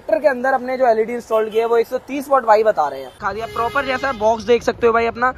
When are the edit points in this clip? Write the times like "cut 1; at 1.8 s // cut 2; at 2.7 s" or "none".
cut 1; at 3.1 s